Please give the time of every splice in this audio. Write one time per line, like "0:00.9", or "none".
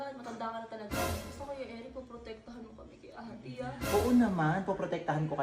0:01.3